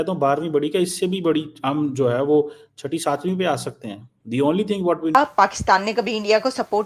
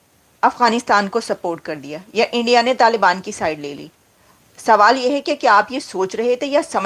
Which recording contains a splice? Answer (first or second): first